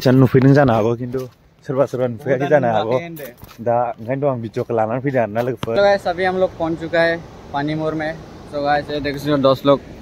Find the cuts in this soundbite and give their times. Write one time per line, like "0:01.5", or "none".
0:05.8